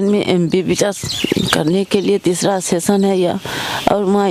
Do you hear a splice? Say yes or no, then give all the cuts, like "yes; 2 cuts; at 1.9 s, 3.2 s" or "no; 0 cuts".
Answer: no; 0 cuts